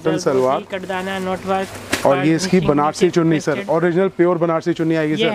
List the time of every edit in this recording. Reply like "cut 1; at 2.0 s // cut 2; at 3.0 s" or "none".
none